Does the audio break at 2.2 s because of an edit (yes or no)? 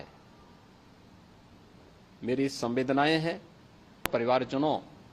no